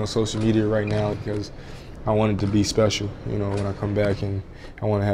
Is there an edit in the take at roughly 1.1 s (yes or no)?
yes